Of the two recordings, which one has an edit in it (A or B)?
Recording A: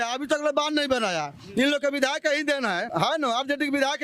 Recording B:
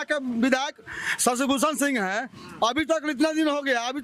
A